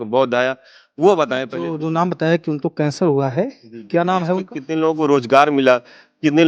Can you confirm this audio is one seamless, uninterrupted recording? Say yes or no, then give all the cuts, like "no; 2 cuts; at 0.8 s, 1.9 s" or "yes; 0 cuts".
no; 2 cuts; at 1.6 s, 4.6 s